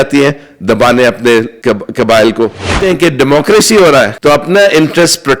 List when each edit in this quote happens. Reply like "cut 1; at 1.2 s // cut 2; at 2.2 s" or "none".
cut 1; at 1.5 s // cut 2; at 2.8 s // cut 3; at 4.1 s